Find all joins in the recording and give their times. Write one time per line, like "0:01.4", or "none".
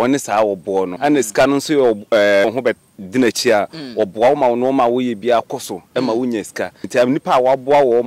0:00.9
0:02.4
0:06.8